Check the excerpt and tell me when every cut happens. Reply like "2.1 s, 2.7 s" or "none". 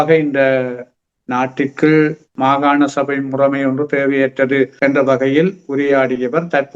2.3 s, 4.7 s

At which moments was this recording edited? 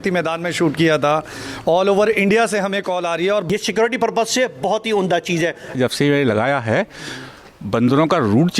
3.5 s, 5.7 s

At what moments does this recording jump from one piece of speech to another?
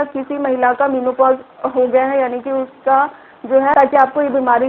3.7 s

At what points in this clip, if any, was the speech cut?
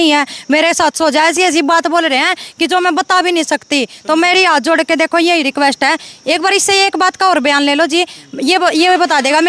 none

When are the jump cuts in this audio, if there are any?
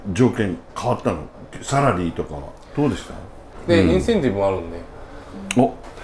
3.5 s

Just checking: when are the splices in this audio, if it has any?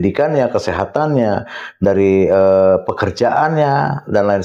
none

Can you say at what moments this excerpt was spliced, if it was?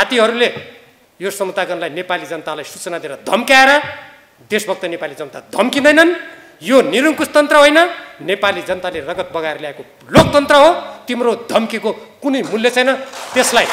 none

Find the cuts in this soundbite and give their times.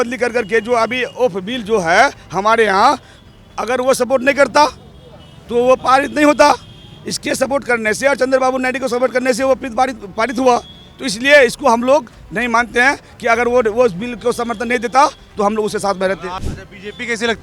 16.4 s

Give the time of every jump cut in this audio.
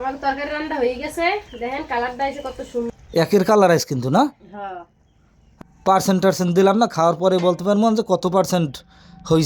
2.9 s, 5.4 s

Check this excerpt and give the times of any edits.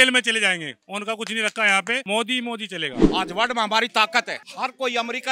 2.0 s, 3.0 s, 4.4 s

